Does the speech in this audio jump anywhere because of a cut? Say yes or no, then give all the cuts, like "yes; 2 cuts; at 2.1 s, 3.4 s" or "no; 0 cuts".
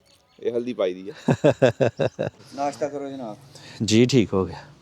yes; 1 cut; at 2.4 s